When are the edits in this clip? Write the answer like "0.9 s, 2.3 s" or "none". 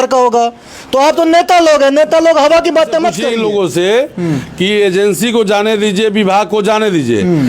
3.2 s